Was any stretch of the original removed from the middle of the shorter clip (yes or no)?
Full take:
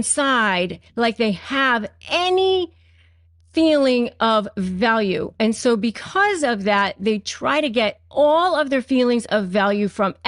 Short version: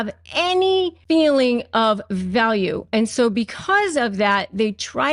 yes